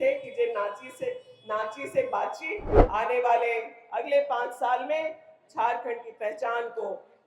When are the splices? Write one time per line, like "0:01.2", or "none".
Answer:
0:02.7